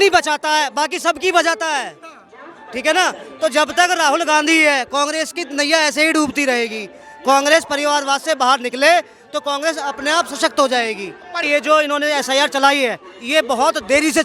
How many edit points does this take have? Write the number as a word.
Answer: one